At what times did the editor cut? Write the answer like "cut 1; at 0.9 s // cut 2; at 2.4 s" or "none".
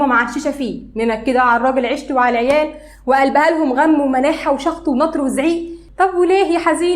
cut 1; at 5.8 s